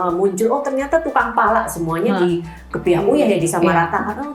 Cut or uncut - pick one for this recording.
uncut